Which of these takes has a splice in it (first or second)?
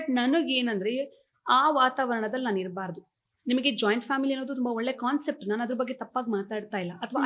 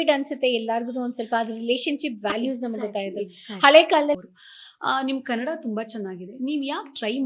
second